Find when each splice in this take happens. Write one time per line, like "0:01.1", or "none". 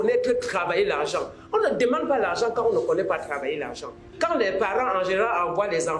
0:04.1